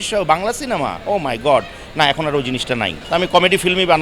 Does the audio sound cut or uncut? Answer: cut